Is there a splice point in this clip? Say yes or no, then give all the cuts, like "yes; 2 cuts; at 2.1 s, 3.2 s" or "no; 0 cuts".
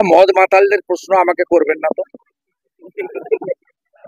no; 0 cuts